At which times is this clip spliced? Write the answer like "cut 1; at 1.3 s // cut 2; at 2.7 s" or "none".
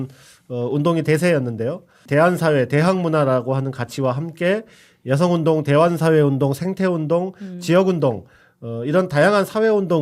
cut 1; at 2.0 s